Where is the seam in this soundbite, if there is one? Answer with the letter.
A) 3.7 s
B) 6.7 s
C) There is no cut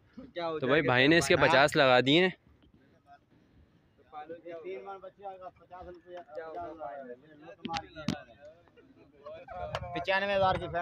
C